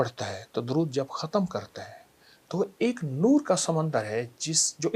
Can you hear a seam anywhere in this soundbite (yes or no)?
no